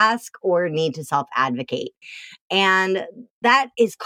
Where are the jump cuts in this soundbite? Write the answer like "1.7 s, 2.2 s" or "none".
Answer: none